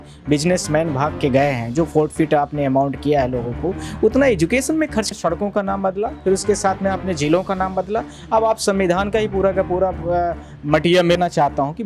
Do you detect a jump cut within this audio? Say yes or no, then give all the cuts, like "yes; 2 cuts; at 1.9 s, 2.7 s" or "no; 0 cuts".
yes; 2 cuts; at 5.1 s, 11.2 s